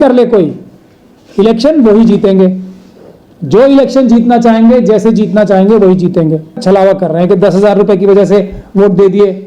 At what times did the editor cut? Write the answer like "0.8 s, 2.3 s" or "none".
6.6 s